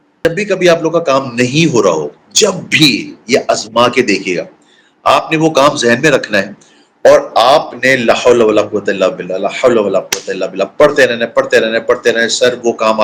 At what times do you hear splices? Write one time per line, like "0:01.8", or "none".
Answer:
none